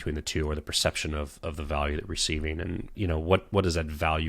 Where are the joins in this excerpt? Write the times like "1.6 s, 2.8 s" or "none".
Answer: 2.9 s